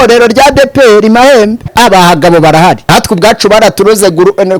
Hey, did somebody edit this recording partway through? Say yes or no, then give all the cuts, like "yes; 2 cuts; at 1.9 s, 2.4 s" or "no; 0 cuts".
yes; 2 cuts; at 1.7 s, 2.8 s